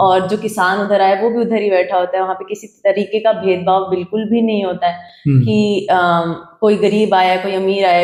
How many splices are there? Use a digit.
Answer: 0